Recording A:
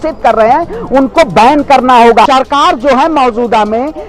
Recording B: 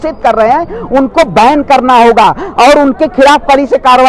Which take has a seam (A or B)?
A